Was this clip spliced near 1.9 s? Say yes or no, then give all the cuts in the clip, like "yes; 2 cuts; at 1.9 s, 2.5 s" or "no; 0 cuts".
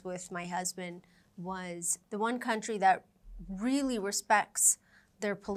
yes; 1 cut; at 1.9 s